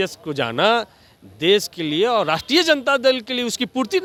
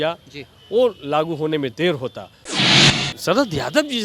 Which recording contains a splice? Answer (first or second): second